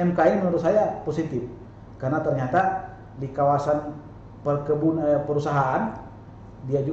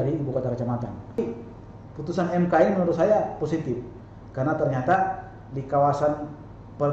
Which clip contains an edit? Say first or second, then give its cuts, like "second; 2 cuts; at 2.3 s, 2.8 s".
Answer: second; 1 cut; at 1.2 s